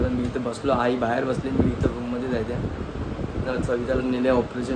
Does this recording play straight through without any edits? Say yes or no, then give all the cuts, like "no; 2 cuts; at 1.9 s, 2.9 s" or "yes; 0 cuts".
yes; 0 cuts